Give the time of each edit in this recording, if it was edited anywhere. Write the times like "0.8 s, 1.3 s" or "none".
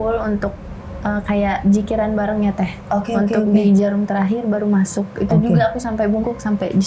none